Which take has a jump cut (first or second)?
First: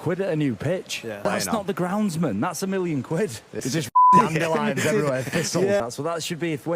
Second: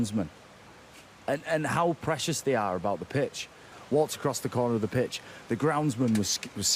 first